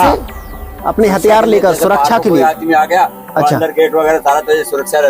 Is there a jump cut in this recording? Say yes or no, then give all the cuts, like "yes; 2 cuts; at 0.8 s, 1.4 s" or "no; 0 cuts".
no; 0 cuts